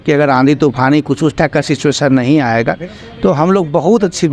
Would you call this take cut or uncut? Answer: uncut